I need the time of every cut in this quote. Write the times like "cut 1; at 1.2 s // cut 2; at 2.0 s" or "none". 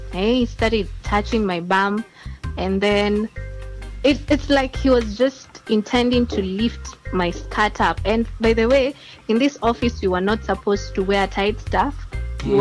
none